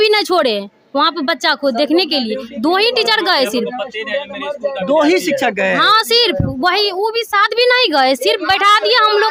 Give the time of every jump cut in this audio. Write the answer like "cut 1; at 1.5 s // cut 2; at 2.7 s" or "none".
none